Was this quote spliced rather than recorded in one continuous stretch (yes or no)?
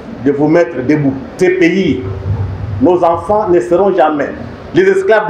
yes